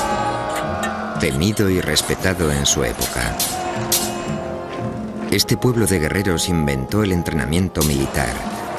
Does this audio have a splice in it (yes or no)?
no